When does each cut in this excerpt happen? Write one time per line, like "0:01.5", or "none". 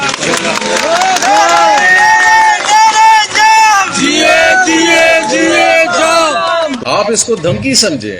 0:06.8